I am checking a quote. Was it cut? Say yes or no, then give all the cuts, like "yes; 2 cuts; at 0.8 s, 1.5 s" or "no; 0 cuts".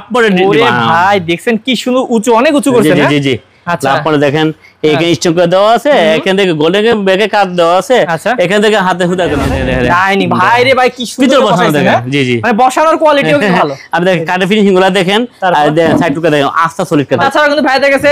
yes; 2 cuts; at 9.5 s, 17.2 s